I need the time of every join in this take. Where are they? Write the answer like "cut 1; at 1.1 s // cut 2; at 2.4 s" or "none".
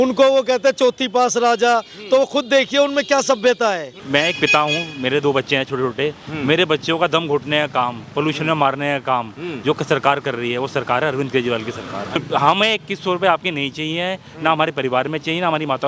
cut 1; at 3.9 s // cut 2; at 12.2 s